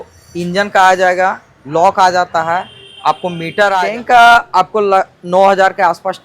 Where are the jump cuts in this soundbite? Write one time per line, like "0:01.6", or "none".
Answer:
0:03.8

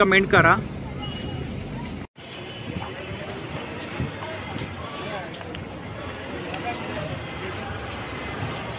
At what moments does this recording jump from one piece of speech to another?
none

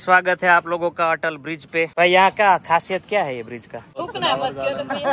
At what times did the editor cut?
0:01.9
0:03.9

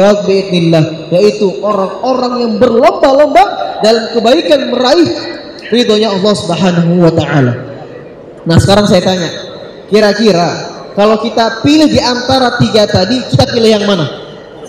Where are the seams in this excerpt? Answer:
none

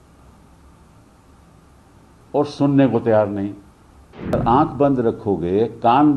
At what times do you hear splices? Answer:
0:04.4

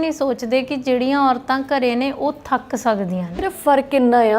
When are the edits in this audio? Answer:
0:03.4

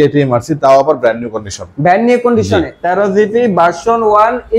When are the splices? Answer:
0:02.8

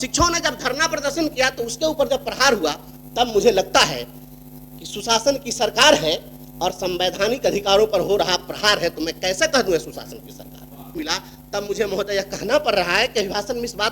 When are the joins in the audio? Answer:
0:11.0

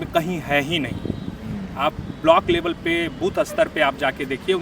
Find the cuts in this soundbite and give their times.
none

